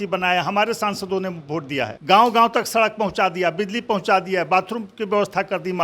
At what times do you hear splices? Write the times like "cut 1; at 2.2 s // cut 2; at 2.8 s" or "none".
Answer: cut 1; at 2.0 s